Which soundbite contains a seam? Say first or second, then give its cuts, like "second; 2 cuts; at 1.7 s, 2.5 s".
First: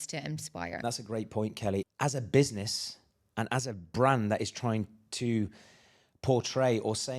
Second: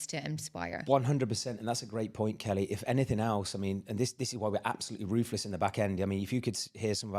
first; 2 cuts; at 0.8 s, 1.9 s